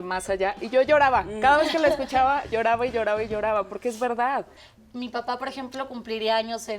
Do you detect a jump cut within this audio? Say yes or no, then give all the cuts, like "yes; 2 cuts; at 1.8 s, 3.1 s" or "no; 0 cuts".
yes; 1 cut; at 4.6 s